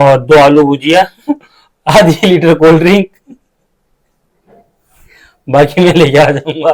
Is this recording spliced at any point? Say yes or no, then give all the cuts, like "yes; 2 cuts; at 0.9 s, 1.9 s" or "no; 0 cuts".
no; 0 cuts